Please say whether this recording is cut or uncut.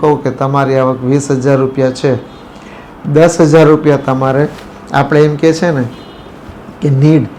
uncut